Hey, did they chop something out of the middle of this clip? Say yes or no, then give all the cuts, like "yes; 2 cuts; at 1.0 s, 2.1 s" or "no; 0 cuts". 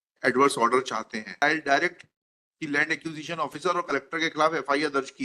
yes; 1 cut; at 1.4 s